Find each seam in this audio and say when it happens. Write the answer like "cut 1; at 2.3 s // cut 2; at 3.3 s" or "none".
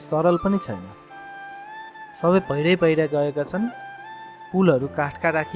none